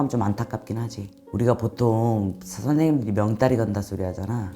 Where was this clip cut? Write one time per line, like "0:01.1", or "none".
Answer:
0:01.2